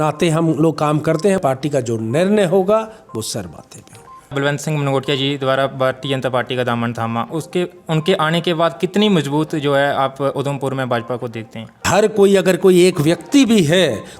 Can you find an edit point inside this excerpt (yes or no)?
yes